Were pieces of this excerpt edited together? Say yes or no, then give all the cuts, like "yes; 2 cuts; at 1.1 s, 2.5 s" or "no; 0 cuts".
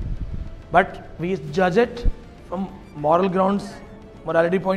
no; 0 cuts